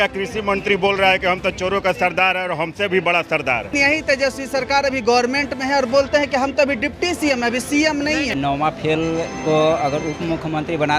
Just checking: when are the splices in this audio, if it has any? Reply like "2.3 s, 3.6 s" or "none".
3.7 s, 8.3 s